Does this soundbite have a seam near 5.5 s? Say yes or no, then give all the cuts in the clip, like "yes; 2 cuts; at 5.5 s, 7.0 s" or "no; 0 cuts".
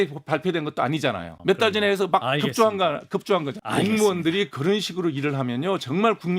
no; 2 cuts; at 1.3 s, 3.6 s